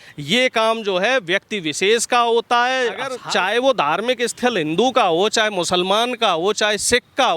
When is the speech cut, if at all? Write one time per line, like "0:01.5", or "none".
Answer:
0:03.1

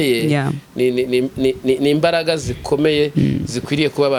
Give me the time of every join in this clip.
none

